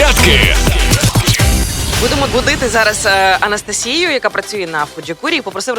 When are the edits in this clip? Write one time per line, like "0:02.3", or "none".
0:01.8